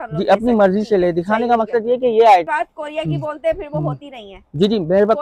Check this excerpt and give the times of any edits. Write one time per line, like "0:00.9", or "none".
0:02.5

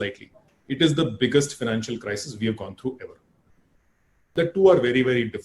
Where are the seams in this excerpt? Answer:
0:04.2

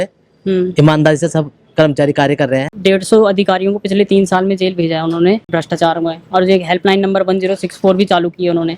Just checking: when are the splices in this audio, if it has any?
0:02.7
0:05.5

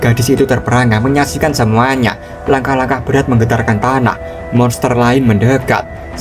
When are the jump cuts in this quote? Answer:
0:02.3

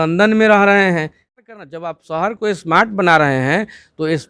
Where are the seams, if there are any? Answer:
0:01.5

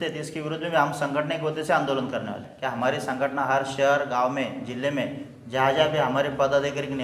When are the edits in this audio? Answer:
0:02.5

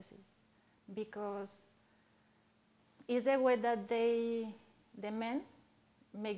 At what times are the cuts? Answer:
none

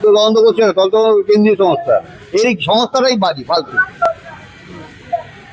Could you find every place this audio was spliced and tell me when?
none

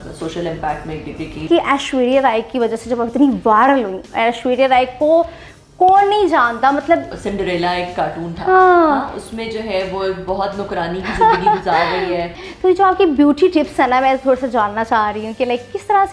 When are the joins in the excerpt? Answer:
0:01.5
0:07.1
0:12.3

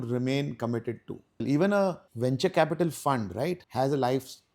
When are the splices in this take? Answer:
0:01.4
0:02.1
0:03.6

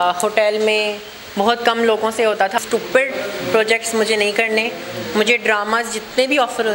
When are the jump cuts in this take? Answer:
0:02.6

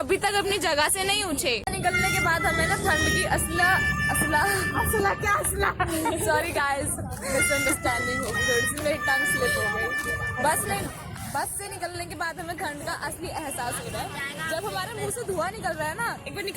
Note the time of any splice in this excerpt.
none

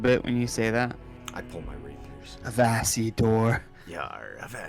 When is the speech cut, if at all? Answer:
0:02.3
0:03.7

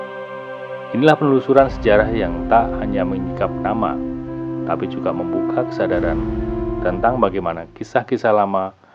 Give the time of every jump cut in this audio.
none

